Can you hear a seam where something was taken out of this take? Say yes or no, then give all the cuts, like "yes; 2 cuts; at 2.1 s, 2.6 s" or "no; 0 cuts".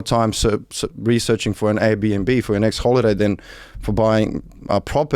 no; 0 cuts